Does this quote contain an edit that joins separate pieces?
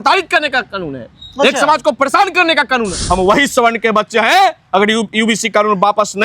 yes; 1 cut; at 2.9 s

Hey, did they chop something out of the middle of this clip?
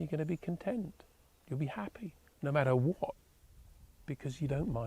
yes; 1 cut; at 2.2 s

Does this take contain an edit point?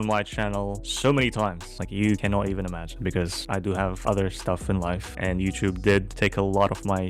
no; 0 cuts

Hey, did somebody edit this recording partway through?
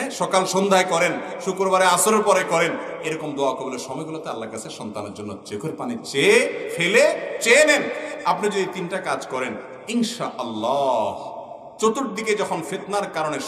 no; 0 cuts

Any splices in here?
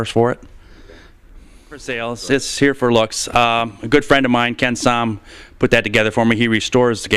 yes; 1 cut; at 4.8 s

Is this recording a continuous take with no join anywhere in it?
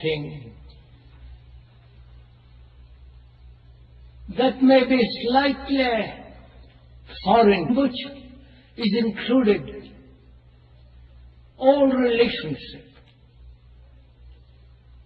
yes; 0 cuts

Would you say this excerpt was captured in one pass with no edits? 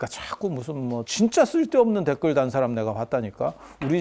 no; 1 cut; at 1.1 s

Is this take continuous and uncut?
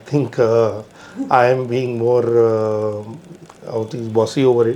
yes; 0 cuts

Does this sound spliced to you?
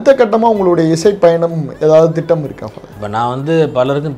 yes; 1 cut; at 2.9 s

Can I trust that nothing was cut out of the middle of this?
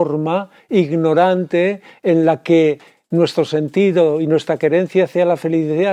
yes; 0 cuts

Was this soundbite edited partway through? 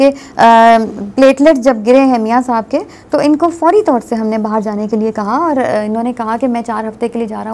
no; 0 cuts

